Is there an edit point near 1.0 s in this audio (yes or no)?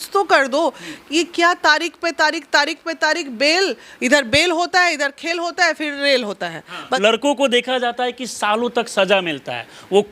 no